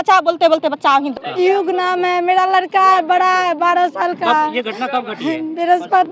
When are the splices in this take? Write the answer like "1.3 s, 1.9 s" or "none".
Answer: none